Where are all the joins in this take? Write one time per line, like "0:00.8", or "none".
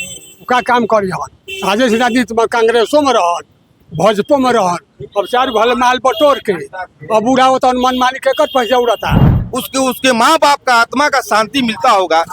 0:09.4